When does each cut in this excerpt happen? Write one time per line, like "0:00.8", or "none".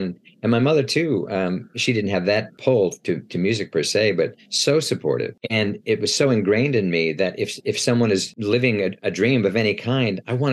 0:02.5
0:05.4
0:08.3